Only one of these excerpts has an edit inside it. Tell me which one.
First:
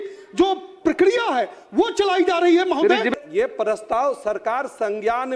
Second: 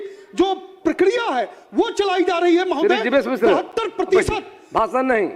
first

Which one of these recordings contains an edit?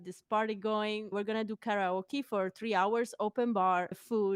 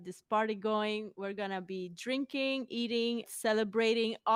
first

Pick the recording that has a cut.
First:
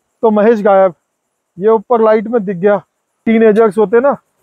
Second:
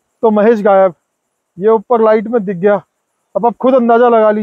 first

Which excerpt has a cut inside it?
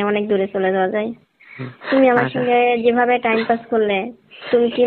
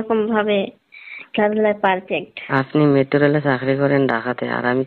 second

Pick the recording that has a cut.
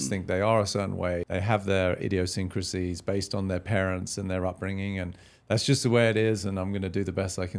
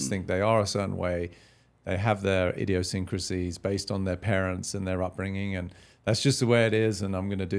first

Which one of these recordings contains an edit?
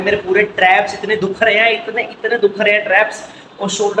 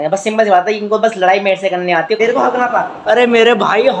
second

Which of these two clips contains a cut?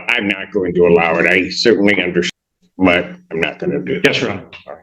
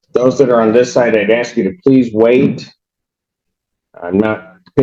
first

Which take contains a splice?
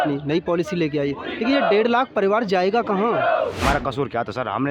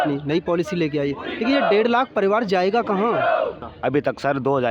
first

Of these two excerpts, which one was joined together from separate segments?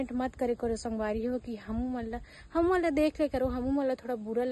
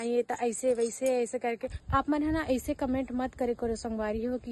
second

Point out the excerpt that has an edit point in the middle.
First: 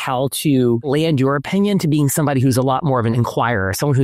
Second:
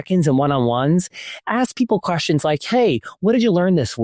first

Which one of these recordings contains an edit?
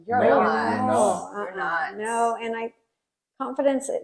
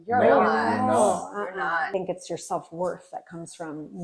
second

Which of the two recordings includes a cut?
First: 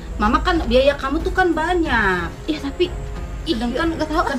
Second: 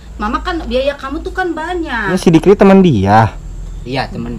second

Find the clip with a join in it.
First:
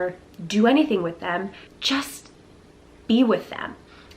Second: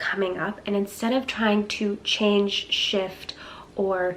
first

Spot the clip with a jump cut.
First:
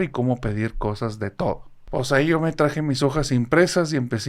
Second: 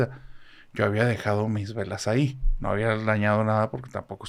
first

